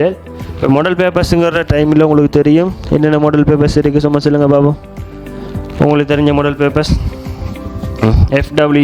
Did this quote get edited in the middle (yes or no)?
no